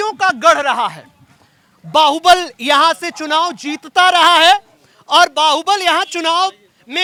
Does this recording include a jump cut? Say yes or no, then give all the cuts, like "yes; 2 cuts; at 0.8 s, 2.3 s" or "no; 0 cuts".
no; 0 cuts